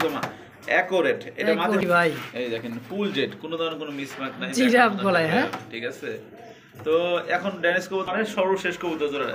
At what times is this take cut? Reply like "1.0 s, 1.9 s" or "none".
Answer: 1.8 s, 8.1 s

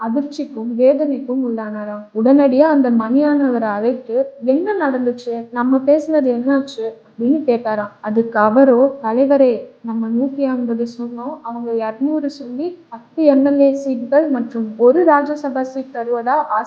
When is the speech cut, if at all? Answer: none

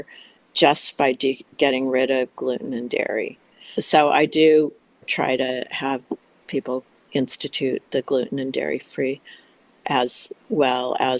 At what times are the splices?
1.5 s, 3.8 s, 5.1 s, 7.0 s

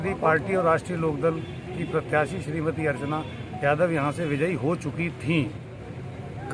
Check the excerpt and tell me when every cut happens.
5.6 s

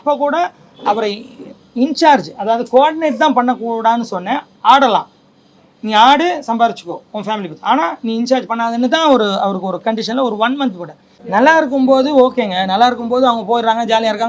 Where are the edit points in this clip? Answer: 11.2 s

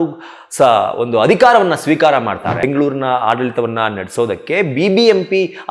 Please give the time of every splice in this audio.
2.6 s

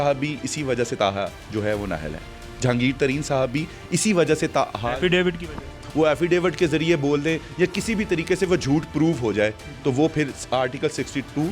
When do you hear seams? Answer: 5.8 s

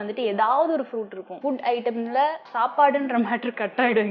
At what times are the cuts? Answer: 1.3 s, 2.5 s

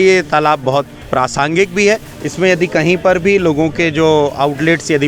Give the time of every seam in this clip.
2.2 s

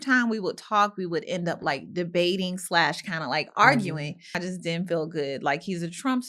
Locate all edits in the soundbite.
4.4 s

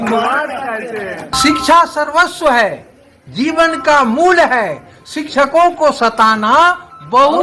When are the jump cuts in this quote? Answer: 1.3 s

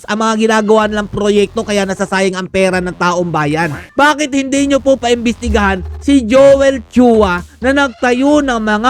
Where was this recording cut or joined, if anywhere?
3.9 s

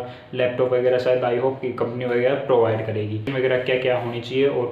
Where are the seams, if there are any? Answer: 3.3 s

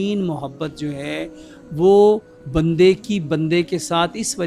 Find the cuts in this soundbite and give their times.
none

